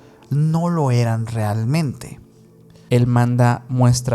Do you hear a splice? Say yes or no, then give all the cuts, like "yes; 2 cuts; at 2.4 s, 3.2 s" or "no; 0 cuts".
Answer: yes; 1 cut; at 2.8 s